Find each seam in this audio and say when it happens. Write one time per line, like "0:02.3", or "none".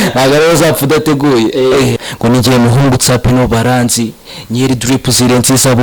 0:01.9